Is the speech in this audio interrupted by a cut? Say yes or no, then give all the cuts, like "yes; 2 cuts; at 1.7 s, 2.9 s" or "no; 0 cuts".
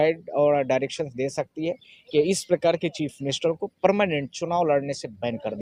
no; 0 cuts